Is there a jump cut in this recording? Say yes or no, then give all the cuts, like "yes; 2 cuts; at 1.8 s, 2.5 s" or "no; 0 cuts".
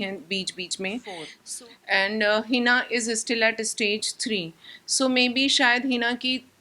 yes; 1 cut; at 1.4 s